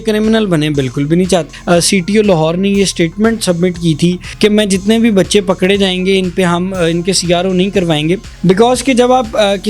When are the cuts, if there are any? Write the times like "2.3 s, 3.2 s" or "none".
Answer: 1.5 s, 4.3 s, 8.3 s